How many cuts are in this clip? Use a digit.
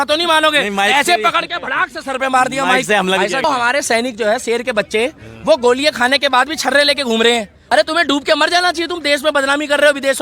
2